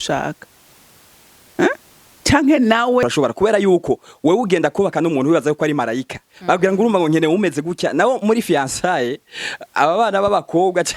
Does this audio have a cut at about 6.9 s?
no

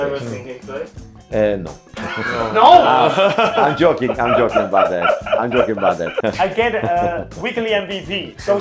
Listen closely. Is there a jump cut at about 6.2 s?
yes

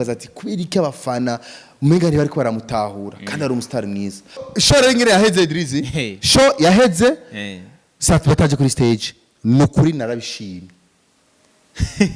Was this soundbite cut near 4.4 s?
yes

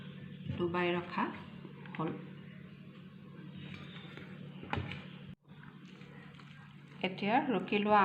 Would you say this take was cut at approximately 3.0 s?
no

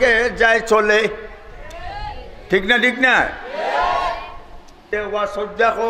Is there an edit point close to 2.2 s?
no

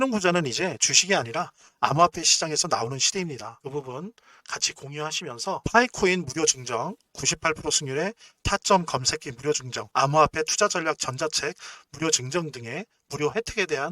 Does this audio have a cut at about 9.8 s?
yes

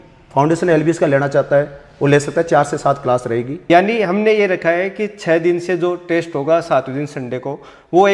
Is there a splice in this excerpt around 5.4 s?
no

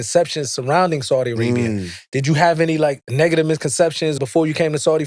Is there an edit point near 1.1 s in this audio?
no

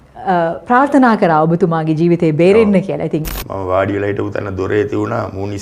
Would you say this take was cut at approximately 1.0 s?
no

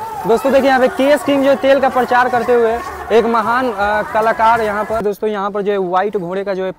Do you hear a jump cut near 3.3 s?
no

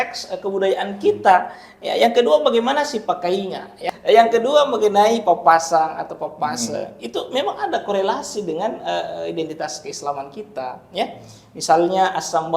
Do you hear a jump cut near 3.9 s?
yes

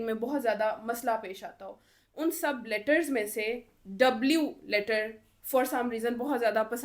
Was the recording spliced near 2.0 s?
yes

